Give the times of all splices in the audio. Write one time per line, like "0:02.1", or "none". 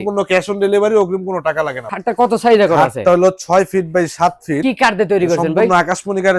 0:01.8
0:04.6